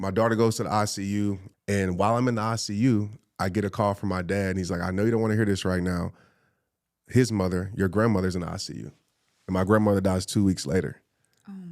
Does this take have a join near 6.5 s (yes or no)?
no